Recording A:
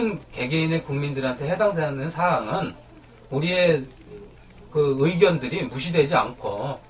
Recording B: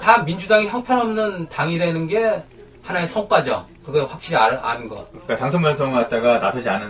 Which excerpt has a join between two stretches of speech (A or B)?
B